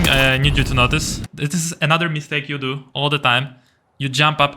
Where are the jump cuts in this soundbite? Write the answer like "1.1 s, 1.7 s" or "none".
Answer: 1.2 s